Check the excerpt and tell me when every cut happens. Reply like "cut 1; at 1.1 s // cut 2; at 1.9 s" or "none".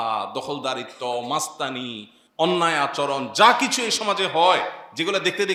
none